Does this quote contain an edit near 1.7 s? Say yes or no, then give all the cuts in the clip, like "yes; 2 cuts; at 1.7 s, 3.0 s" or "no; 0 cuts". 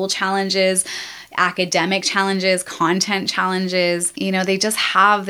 no; 1 cut; at 4.1 s